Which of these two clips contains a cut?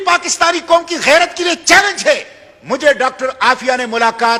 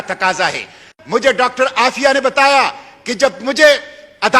second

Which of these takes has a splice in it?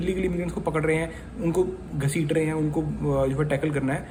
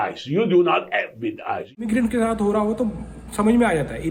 second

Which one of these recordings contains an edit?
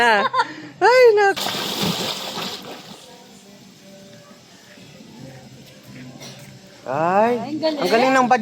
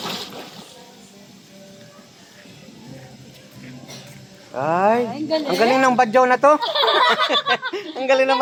first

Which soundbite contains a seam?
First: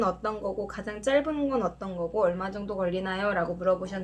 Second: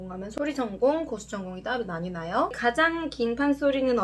second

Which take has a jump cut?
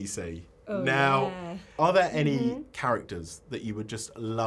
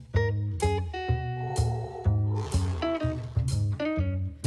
first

